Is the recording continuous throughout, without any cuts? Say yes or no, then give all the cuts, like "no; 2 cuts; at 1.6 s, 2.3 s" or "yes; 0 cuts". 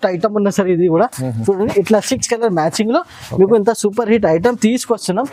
yes; 0 cuts